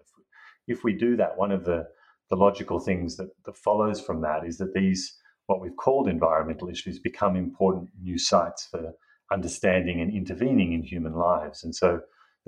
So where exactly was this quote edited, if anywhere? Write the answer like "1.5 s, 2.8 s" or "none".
none